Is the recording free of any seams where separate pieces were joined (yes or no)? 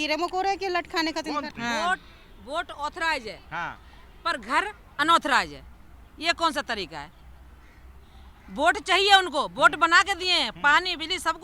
no